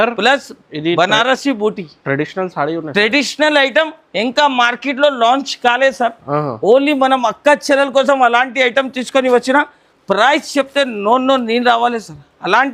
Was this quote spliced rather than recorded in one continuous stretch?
no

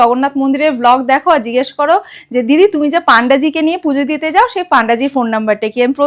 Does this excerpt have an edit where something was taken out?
no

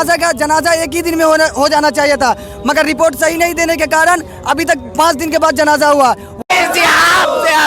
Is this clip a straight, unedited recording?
no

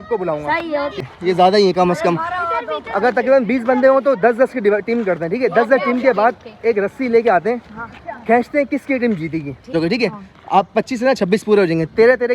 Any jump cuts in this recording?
yes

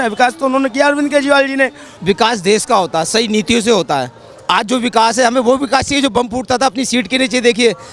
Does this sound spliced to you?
yes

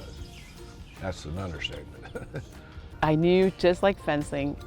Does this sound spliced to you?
yes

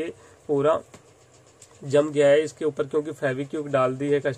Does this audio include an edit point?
no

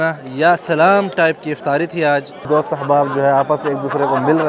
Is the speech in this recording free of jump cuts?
no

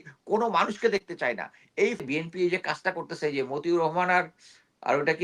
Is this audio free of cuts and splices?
no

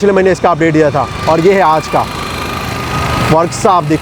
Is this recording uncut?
yes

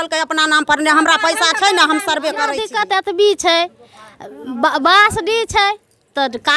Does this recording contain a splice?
yes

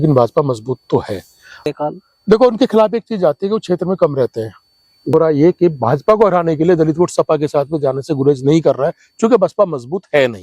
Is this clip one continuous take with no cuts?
no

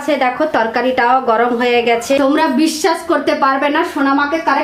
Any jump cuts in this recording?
yes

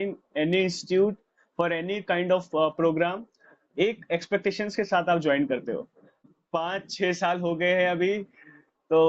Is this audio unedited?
no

